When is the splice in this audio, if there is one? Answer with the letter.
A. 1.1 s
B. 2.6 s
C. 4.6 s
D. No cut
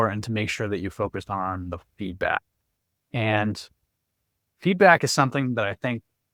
D